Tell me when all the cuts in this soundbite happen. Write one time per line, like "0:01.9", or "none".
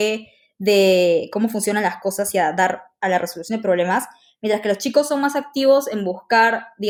none

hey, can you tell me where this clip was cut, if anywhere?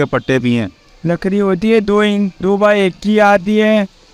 none

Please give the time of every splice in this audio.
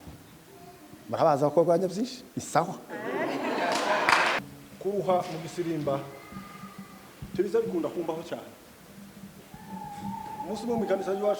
0:04.4

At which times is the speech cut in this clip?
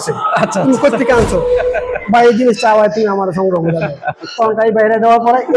none

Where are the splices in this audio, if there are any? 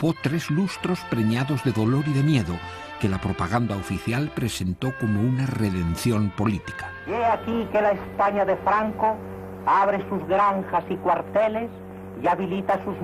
0:01.0

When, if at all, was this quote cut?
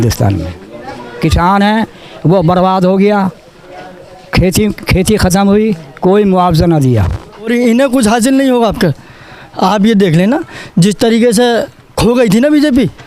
0:07.5

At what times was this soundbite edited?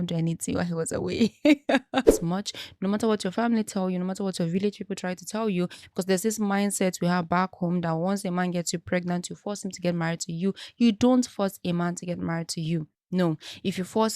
0:02.1

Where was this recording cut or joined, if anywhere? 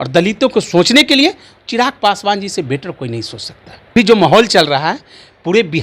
0:03.9

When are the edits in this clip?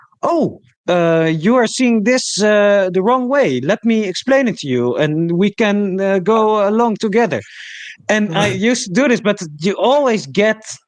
none

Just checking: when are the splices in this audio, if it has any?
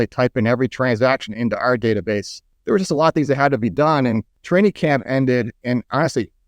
0:02.3
0:04.3

